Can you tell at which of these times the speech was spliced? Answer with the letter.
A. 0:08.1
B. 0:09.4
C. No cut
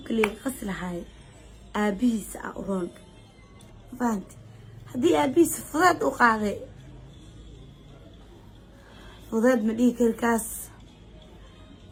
C